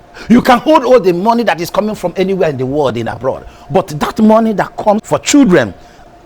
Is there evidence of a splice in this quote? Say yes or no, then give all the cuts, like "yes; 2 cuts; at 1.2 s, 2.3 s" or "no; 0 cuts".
yes; 1 cut; at 5.0 s